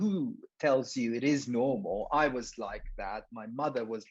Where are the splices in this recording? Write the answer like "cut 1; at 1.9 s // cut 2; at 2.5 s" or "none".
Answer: none